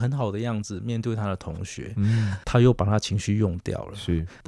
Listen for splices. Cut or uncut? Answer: uncut